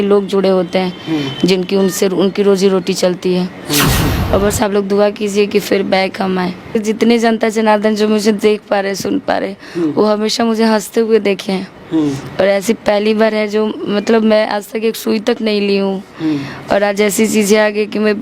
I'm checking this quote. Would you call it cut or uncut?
cut